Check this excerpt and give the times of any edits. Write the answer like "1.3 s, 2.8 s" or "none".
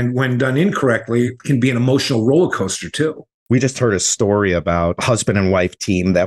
1.4 s, 3.3 s, 5.0 s